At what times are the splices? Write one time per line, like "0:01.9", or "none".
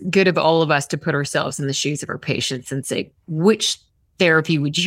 none